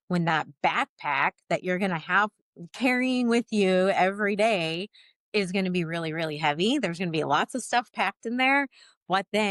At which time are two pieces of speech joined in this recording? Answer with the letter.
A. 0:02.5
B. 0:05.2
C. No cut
C